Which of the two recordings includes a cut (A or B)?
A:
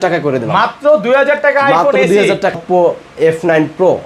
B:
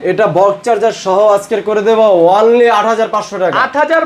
A